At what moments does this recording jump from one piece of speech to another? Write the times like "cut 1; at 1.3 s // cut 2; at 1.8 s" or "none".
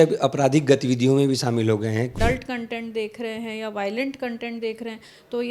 cut 1; at 2.1 s